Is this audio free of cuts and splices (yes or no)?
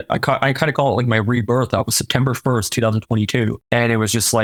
yes